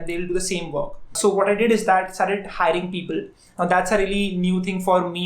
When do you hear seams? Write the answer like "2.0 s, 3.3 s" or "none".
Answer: 1.2 s